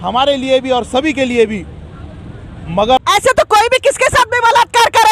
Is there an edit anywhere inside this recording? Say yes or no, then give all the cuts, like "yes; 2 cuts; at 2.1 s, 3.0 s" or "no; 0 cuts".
yes; 1 cut; at 3.0 s